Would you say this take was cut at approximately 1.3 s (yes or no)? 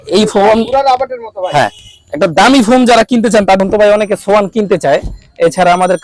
no